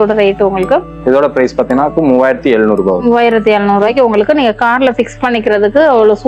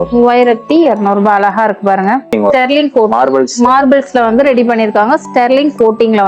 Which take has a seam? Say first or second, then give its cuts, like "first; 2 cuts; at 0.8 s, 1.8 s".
second; 1 cut; at 2.3 s